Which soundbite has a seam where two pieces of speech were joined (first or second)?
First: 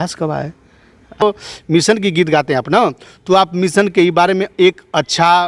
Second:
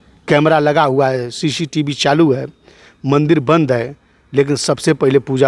first